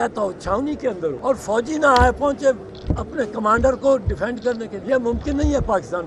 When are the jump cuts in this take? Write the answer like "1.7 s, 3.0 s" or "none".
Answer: 1.2 s, 4.8 s